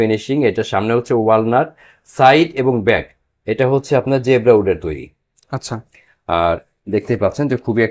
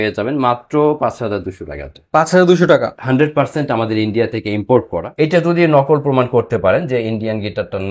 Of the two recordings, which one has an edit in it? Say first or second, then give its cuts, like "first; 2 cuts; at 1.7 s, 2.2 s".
second; 2 cuts; at 2.9 s, 5.0 s